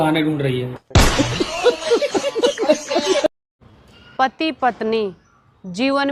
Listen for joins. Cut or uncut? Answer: uncut